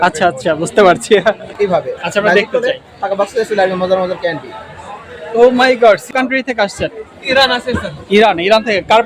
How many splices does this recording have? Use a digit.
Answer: 2